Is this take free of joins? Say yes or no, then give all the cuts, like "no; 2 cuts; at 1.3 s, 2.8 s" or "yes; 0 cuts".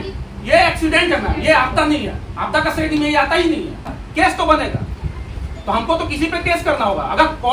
no; 1 cut; at 4.0 s